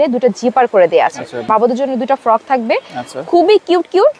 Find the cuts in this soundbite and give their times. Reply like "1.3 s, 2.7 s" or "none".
1.5 s